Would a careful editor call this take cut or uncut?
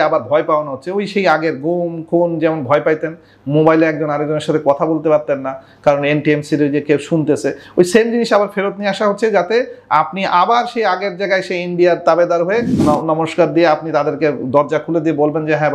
uncut